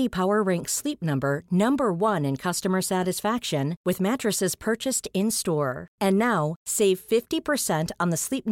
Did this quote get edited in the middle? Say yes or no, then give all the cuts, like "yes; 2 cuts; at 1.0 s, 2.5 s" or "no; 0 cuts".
no; 0 cuts